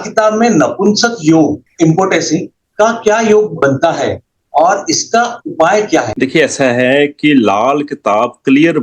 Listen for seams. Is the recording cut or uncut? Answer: cut